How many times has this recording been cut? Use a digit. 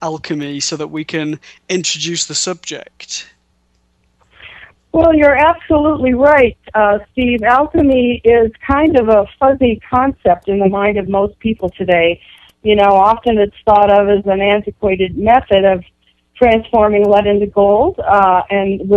1